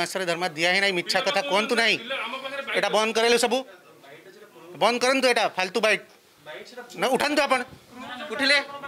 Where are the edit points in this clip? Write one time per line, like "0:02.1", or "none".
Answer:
none